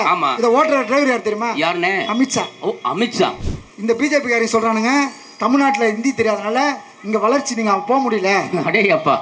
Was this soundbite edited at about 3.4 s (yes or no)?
yes